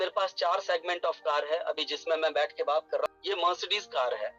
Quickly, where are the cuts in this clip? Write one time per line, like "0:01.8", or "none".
0:03.1